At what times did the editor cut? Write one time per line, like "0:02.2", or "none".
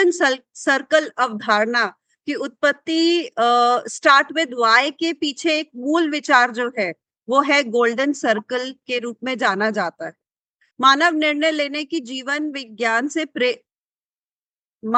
none